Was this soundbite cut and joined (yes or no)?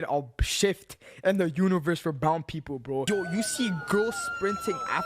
yes